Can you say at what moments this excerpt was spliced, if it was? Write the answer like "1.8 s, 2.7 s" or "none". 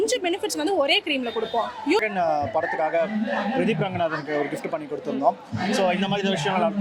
2.0 s

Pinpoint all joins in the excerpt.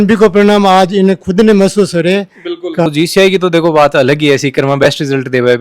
2.9 s

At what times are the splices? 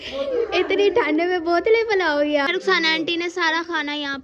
2.5 s

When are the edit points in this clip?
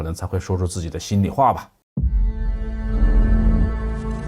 1.8 s

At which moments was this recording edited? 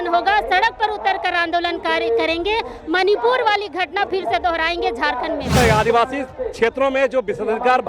5.6 s

